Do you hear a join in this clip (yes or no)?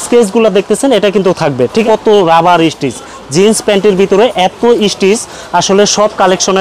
no